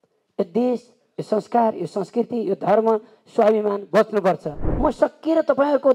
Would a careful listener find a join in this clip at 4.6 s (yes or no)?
yes